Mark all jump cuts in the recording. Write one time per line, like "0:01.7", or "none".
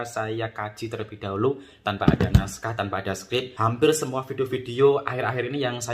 0:03.5